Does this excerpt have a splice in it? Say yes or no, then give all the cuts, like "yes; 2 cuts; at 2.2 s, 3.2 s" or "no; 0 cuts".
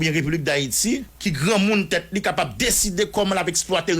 yes; 1 cut; at 1.1 s